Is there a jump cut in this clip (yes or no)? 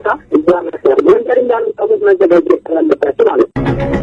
no